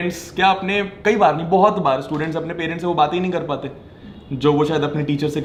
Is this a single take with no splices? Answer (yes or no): yes